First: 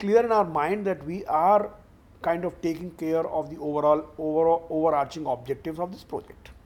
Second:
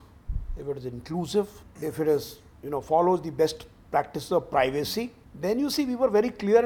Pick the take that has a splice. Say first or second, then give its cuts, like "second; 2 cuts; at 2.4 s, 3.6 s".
second; 2 cuts; at 1.6 s, 5.2 s